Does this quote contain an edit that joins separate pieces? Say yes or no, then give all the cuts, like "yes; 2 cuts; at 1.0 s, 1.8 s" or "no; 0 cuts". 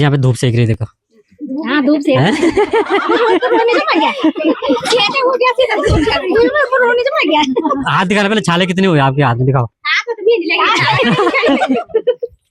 no; 0 cuts